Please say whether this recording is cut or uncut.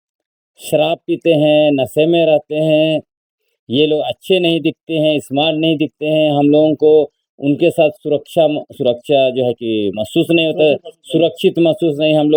uncut